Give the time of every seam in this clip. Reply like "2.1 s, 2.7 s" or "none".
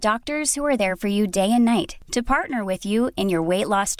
none